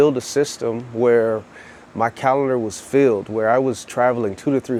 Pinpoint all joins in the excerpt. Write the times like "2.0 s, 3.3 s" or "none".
none